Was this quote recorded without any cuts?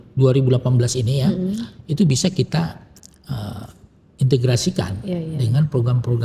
yes; 0 cuts

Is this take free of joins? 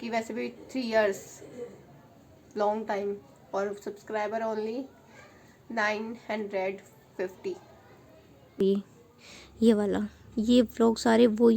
no; 1 cut; at 8.6 s

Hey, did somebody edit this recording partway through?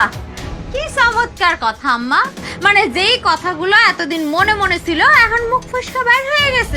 no; 0 cuts

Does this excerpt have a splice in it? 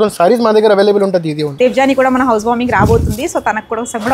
yes; 1 cut; at 1.6 s

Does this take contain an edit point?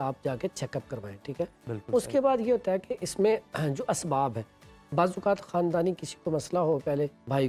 no; 0 cuts

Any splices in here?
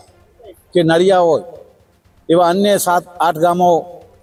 no; 0 cuts

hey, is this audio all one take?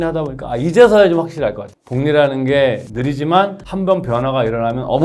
no; 2 cuts; at 1.7 s, 2.9 s

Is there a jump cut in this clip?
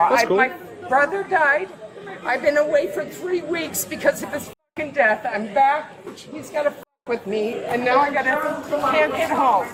no; 0 cuts

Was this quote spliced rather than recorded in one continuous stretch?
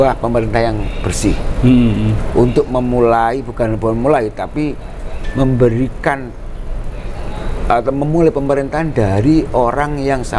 no; 0 cuts

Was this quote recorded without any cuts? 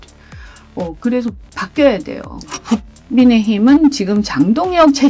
no; 1 cut; at 2.6 s

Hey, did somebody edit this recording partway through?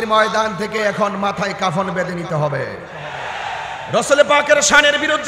no; 0 cuts

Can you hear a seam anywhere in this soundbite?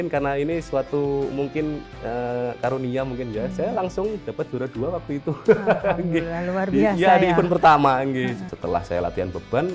yes; 1 cut; at 8.4 s

